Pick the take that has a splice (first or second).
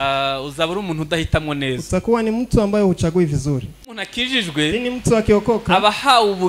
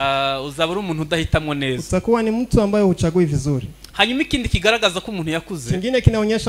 first